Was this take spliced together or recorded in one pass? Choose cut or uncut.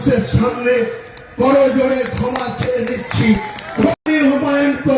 cut